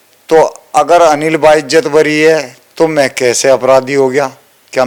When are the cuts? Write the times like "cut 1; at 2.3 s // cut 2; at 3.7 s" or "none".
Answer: none